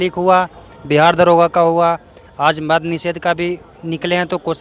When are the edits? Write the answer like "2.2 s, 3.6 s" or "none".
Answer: none

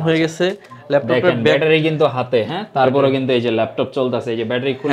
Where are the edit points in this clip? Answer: none

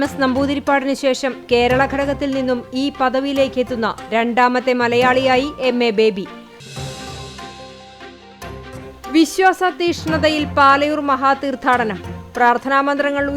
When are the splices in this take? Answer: 6.4 s, 8.8 s

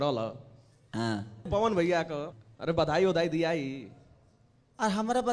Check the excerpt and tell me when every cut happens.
1.4 s, 2.3 s

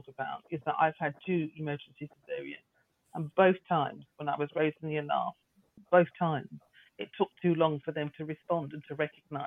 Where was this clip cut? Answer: 5.8 s

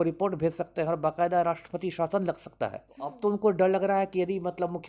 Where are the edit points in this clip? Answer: 3.1 s

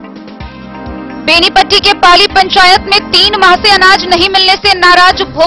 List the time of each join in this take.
1.1 s

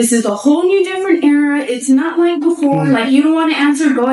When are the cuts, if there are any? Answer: none

